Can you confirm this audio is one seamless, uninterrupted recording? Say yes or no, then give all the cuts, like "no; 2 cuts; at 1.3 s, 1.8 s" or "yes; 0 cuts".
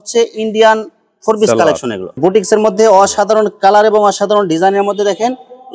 no; 1 cut; at 2.1 s